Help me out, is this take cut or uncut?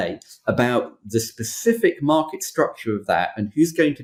uncut